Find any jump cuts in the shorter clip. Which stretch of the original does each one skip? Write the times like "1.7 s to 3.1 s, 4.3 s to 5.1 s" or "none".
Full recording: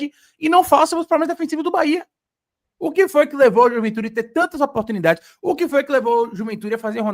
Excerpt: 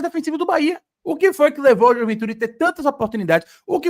2.2 s to 2.7 s

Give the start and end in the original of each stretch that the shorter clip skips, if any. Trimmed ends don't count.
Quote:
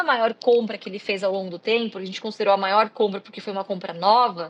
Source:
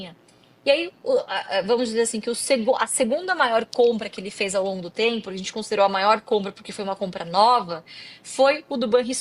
none

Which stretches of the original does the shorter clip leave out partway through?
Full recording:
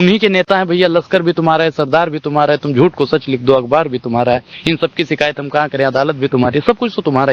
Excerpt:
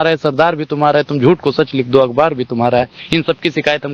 none

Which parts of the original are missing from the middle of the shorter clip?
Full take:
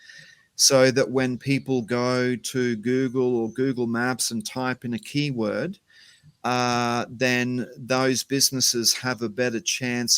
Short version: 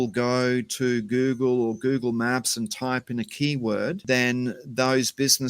5.7 s to 7.1 s

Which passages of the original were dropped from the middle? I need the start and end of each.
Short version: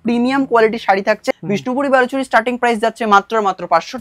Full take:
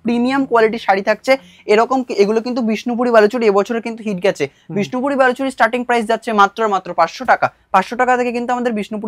1.2 s to 4.5 s

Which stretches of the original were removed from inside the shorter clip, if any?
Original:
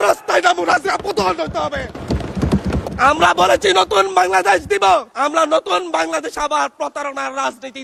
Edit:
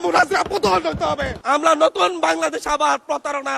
1.9 s to 5.1 s

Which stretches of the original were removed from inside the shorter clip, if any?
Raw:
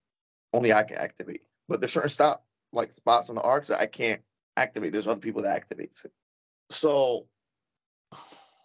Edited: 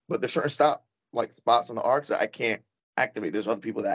none

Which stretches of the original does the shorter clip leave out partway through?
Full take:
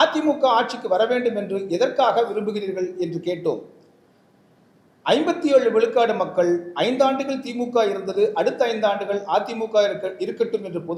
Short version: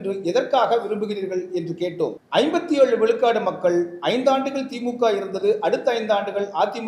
3.7 s to 4.9 s

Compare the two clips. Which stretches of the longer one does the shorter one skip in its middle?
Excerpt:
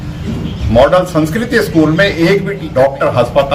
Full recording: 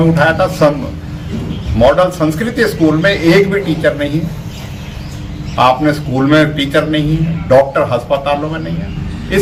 3.6 s to 7.3 s

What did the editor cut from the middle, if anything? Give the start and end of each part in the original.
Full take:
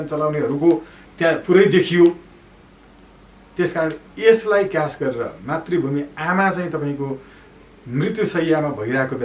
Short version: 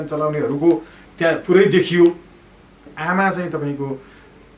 2.9 s to 6.1 s

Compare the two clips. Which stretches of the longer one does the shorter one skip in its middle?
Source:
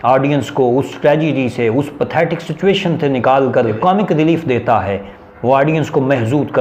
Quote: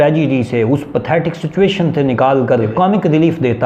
none

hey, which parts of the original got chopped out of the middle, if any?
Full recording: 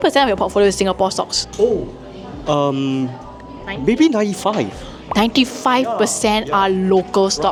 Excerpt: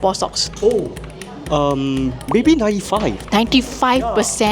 3.2 s to 3.7 s, 4.7 s to 5.0 s

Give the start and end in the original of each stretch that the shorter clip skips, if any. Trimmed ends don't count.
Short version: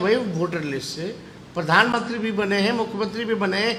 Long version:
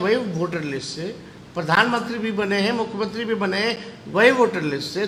none

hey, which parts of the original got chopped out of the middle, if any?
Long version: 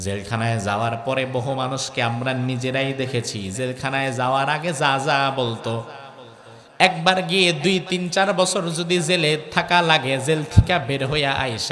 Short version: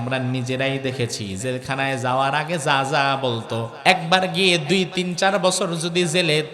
5.9 s to 6.7 s

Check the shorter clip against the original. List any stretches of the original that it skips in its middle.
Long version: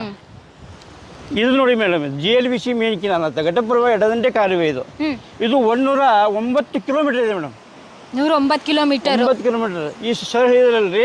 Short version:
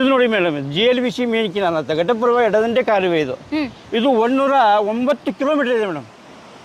none

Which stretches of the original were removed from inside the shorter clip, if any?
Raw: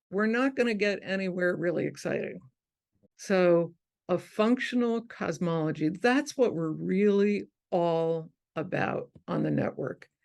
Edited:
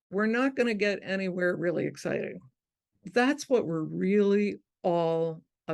3.1 s to 6.0 s

